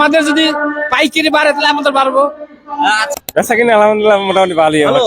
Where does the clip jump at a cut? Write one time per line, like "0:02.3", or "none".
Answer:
0:03.1